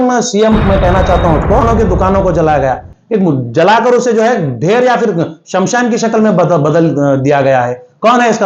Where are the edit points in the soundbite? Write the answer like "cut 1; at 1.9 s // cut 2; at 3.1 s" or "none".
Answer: cut 1; at 1.6 s